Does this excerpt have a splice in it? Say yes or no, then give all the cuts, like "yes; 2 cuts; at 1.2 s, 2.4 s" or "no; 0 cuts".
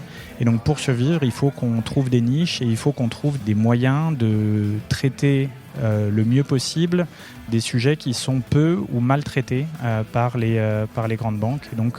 yes; 2 cuts; at 3.4 s, 7.5 s